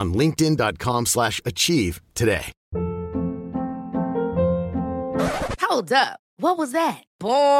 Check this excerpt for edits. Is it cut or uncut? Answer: cut